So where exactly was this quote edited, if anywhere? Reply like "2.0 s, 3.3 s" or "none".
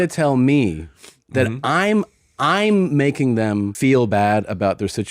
3.7 s